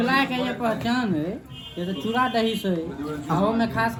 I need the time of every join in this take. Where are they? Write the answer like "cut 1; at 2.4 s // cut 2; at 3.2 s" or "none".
none